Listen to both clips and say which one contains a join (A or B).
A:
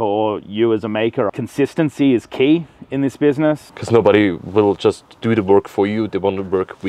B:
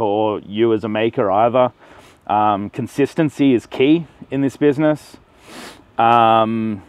A